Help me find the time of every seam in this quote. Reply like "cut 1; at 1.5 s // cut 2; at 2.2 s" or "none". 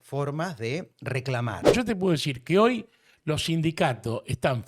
cut 1; at 1.7 s

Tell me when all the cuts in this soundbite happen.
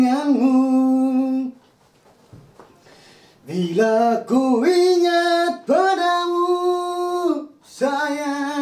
none

